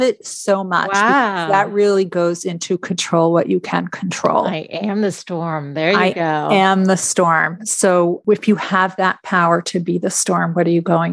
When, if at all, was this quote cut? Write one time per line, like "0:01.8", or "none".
0:08.2

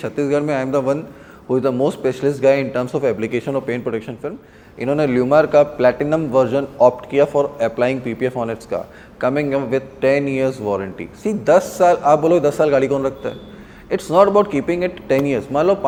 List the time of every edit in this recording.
none

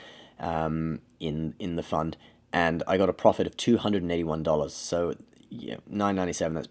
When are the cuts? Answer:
none

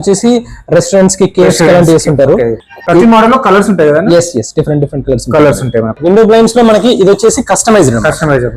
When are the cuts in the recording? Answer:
0:06.0

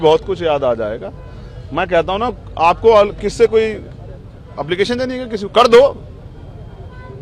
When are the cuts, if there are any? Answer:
none

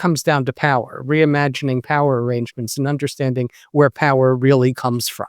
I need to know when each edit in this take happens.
none

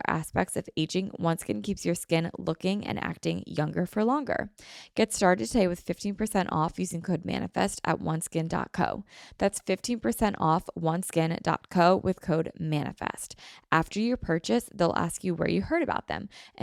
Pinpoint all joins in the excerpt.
none

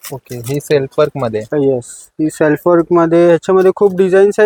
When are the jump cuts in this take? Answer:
none

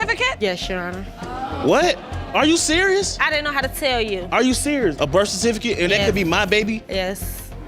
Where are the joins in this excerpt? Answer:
0:04.9

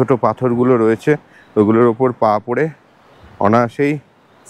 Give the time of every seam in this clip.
none

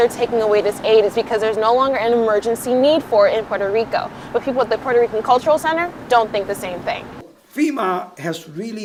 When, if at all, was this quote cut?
none

